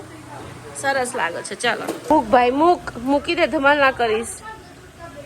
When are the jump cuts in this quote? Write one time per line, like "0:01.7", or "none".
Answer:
0:02.0